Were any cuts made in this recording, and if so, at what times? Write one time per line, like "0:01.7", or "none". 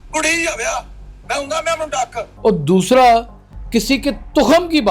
0:02.2